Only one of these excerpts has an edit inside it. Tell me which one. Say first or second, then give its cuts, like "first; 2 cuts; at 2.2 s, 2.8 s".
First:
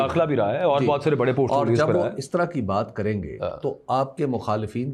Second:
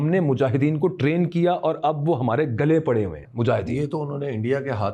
second; 1 cut; at 3.2 s